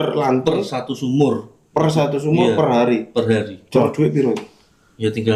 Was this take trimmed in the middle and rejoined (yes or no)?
no